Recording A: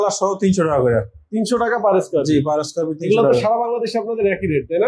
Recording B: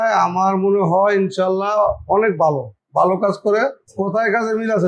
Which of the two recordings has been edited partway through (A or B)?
B